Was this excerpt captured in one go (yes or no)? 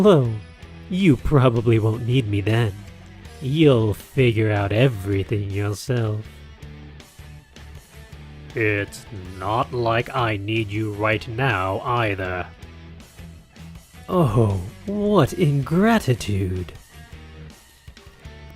no